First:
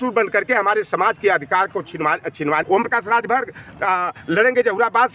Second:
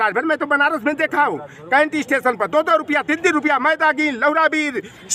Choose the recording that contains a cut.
first; 1 cut; at 2.6 s

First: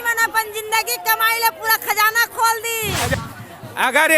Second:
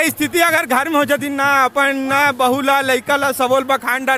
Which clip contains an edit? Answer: first; 1 cut; at 2.9 s

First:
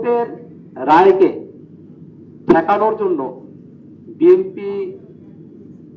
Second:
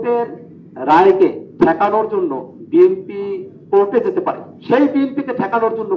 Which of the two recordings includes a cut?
second; 4 cuts; at 1.4 s, 2.5 s, 3.5 s, 4.5 s

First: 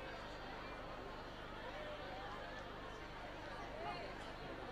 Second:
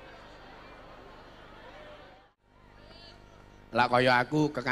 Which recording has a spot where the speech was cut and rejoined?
second; 1 cut; at 2.3 s

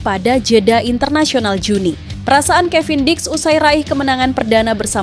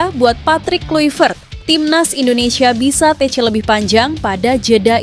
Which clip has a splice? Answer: first; 1 cut; at 2.1 s

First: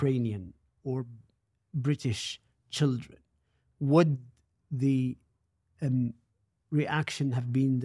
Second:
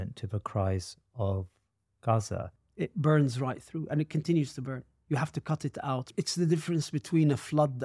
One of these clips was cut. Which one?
second; 2 cuts; at 2.6 s, 6.1 s

